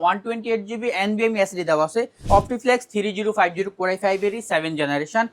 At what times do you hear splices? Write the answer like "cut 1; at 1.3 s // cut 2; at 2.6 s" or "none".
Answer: cut 1; at 2.2 s